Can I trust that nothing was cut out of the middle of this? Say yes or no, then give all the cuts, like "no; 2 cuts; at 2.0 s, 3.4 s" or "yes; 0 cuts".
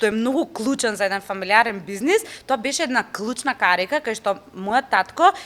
yes; 0 cuts